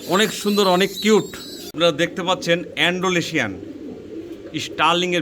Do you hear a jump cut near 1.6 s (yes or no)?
yes